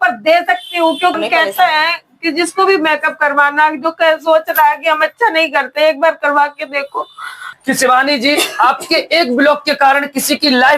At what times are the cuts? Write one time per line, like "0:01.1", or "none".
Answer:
0:01.2
0:07.4

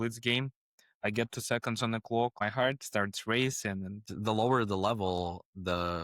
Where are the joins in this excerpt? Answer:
0:02.4
0:04.0

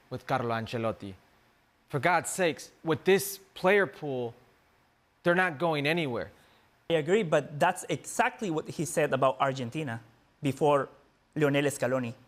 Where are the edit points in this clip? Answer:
0:06.9

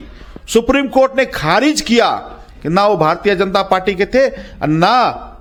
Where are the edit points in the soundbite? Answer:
none

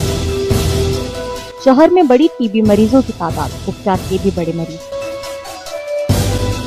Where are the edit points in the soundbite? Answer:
none

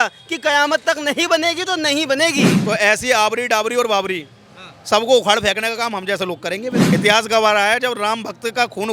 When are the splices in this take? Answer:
0:02.5
0:06.8

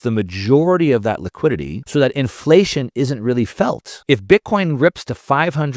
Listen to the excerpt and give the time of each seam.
0:01.7
0:03.9

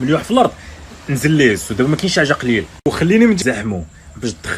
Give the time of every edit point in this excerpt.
0:03.4

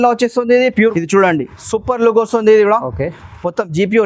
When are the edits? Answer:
0:00.9

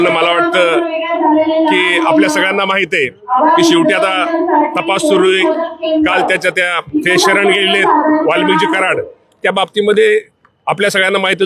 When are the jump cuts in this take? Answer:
none

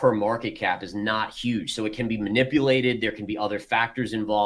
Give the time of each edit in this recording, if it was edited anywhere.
none

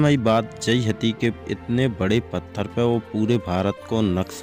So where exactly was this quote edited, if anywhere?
none

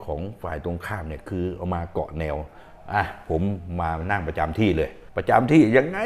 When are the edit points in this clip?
none

